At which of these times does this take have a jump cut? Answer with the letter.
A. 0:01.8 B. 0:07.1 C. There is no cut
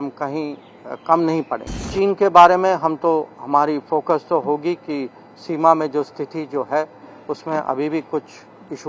A